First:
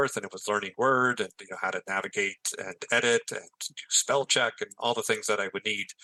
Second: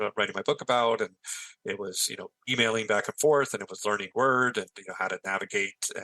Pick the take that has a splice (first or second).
second